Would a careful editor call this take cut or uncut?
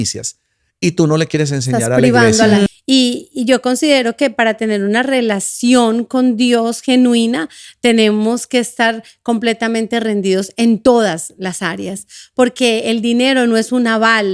cut